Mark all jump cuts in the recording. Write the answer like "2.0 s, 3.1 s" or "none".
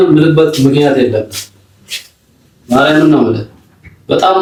none

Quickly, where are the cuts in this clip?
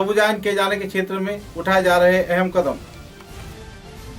none

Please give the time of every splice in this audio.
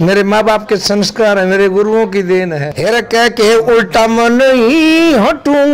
2.6 s

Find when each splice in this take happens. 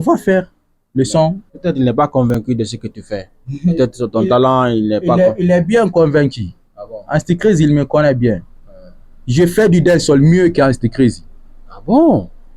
1.5 s

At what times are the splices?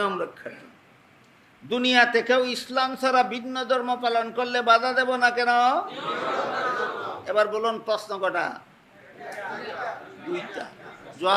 none

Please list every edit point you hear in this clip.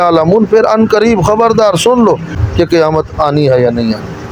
2.4 s

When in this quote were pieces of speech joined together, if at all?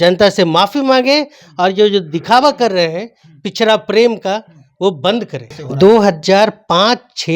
5.6 s

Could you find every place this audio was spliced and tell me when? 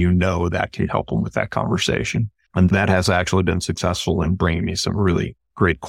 2.7 s

